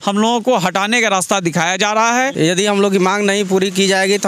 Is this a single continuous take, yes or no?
no